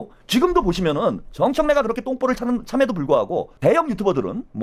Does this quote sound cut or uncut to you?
uncut